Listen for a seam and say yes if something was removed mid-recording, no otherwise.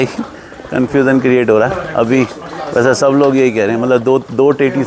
no